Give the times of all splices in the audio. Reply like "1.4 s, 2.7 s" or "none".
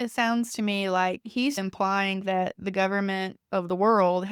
3.4 s